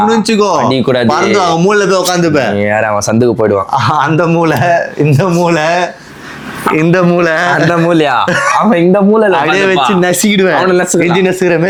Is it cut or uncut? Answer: uncut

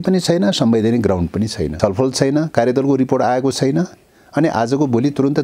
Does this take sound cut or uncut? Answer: cut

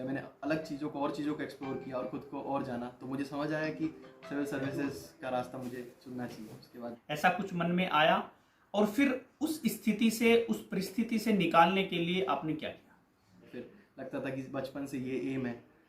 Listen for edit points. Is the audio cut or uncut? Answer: cut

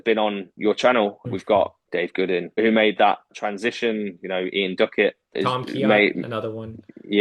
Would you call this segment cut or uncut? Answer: cut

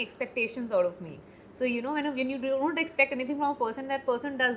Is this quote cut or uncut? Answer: uncut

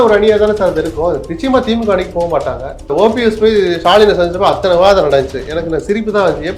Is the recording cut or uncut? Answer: cut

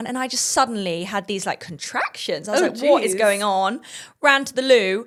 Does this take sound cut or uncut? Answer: uncut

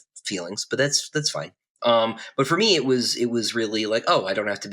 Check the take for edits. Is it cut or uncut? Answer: uncut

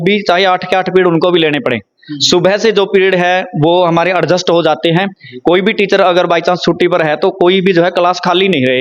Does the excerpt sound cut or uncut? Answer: uncut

